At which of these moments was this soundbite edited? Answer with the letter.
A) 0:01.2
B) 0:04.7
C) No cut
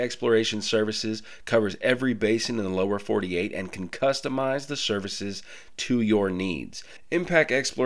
C